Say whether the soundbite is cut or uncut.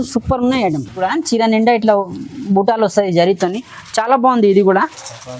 cut